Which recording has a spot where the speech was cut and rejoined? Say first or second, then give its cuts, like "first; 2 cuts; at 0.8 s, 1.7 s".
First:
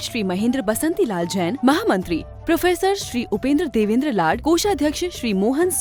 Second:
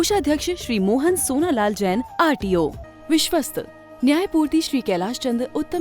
second; 1 cut; at 2.8 s